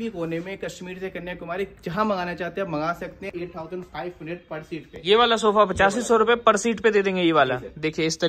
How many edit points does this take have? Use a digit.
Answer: 1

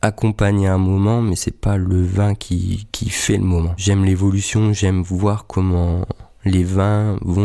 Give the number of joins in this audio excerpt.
1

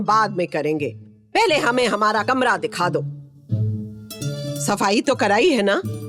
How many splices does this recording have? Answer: 1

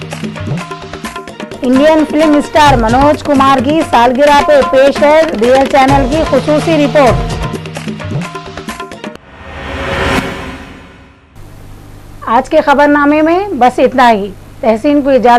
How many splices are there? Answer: 0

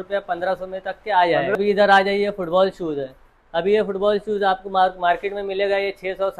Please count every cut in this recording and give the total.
1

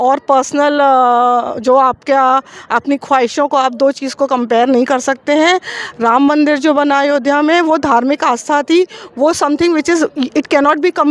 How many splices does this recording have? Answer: 0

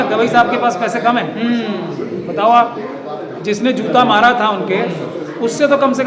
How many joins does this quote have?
0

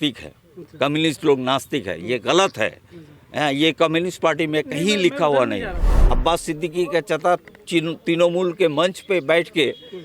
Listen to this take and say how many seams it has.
1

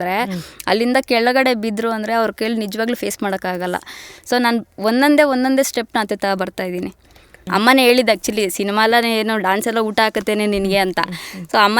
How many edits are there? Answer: 1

